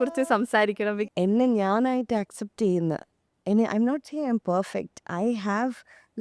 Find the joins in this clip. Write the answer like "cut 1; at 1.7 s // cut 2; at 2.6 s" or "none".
cut 1; at 1.1 s